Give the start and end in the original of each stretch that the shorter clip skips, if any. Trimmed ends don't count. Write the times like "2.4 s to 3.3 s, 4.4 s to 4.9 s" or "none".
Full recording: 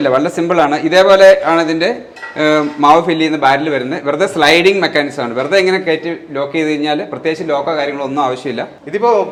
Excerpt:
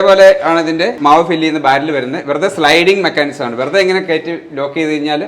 2.0 s to 2.7 s